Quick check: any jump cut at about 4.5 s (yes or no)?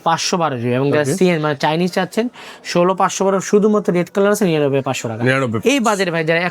no